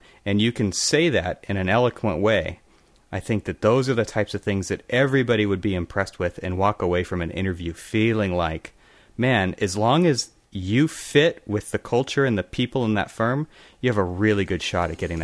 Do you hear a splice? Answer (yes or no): no